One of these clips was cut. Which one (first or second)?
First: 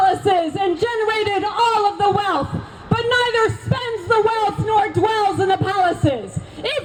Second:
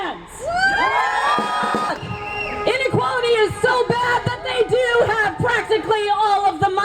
second